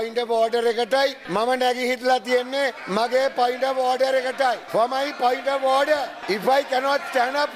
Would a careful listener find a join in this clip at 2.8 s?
yes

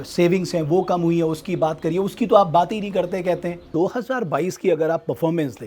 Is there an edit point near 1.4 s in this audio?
no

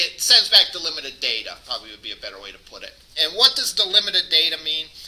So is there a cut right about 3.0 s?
no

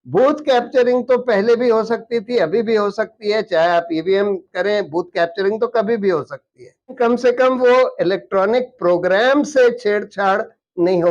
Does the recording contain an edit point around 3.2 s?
no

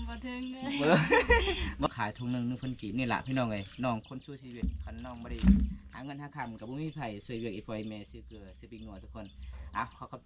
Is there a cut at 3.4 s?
no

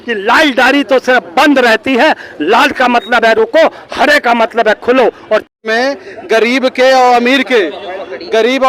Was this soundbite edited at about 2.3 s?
no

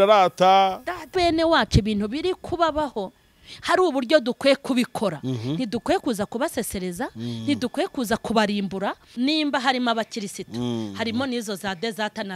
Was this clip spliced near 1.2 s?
yes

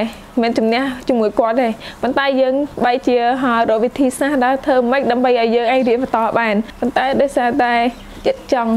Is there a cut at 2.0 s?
no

